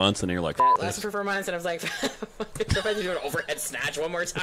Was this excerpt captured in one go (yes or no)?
yes